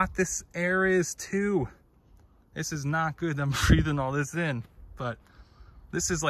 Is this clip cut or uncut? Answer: uncut